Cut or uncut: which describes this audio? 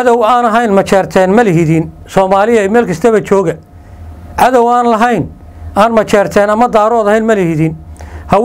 uncut